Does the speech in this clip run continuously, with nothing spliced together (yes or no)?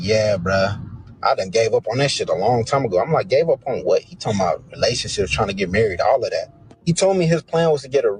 no